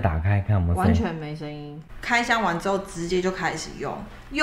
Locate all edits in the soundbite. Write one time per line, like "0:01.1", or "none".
0:01.4